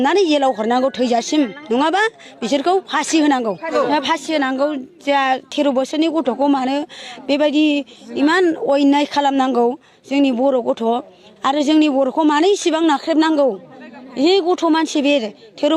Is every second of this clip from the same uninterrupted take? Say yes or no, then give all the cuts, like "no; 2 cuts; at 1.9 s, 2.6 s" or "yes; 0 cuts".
no; 1 cut; at 3.7 s